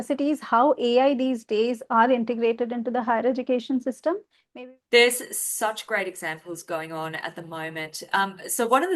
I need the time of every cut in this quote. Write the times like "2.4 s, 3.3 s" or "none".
4.4 s